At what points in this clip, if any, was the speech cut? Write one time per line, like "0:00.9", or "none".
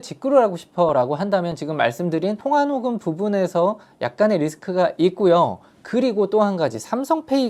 none

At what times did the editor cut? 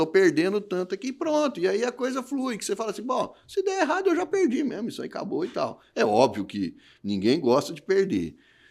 none

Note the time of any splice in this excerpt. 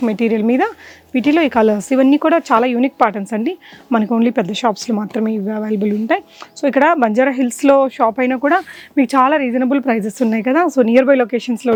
none

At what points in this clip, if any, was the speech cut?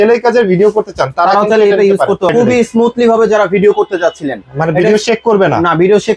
0:02.3

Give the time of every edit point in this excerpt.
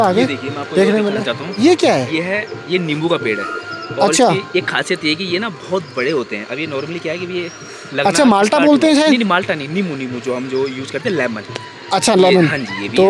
none

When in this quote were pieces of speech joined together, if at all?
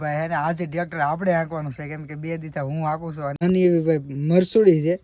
0:03.4

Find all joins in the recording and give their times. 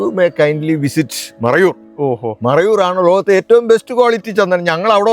none

